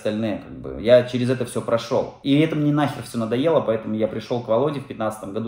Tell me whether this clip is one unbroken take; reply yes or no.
no